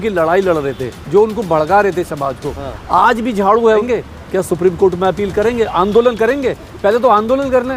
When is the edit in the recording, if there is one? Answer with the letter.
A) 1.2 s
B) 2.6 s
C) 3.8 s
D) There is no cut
C